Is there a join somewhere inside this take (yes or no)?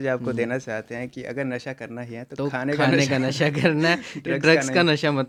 no